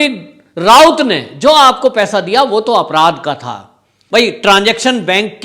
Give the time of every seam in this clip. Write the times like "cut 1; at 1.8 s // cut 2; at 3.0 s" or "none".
cut 1; at 3.9 s